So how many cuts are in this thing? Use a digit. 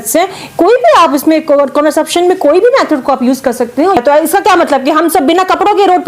1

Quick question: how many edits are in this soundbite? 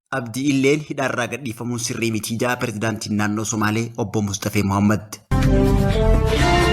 1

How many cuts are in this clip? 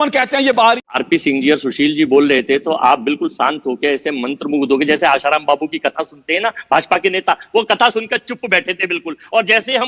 1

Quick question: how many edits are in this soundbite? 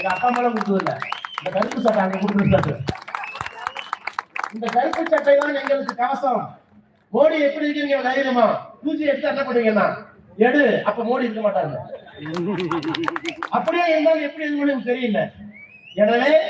0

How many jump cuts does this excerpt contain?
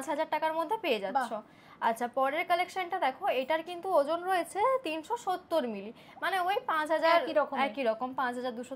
0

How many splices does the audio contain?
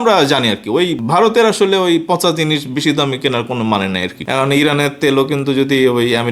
1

